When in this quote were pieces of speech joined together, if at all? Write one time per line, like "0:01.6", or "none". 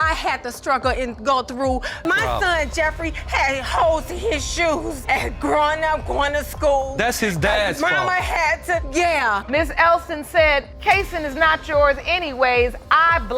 0:09.4